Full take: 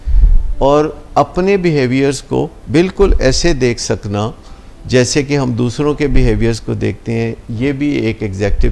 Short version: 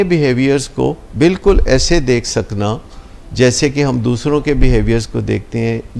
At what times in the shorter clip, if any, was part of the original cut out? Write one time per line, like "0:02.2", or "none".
none